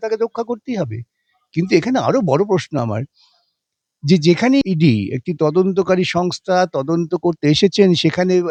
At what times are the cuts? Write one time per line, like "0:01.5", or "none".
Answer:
none